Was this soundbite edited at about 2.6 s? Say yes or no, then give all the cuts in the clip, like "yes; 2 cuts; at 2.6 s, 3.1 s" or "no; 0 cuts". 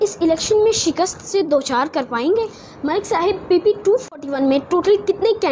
yes; 1 cut; at 2.6 s